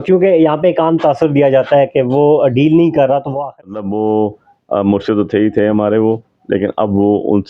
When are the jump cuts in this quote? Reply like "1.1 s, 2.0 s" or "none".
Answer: 3.3 s